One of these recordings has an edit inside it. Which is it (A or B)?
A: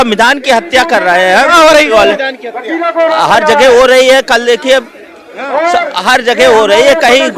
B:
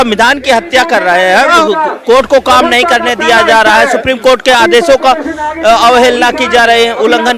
B